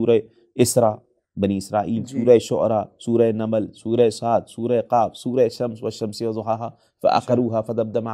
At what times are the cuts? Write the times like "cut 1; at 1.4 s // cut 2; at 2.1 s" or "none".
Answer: none